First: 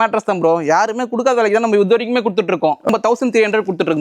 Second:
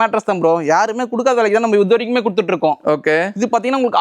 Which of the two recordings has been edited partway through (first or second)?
first